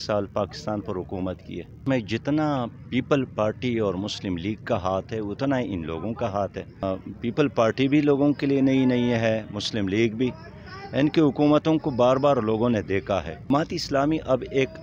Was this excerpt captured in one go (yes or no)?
no